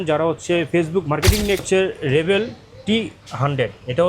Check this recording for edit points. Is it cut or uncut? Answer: cut